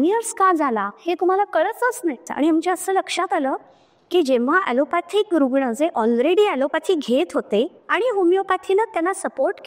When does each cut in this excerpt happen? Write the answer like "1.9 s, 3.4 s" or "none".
2.3 s